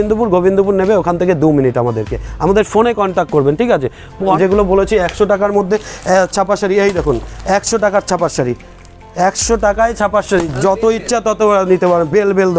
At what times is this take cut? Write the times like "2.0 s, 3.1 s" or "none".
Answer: 4.4 s